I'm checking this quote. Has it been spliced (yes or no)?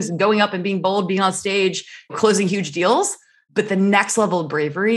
yes